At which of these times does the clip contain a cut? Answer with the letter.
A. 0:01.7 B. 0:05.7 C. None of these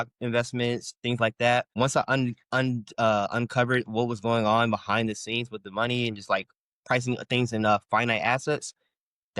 A